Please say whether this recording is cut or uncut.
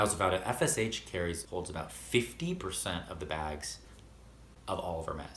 uncut